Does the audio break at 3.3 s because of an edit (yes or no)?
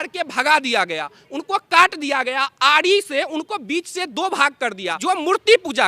no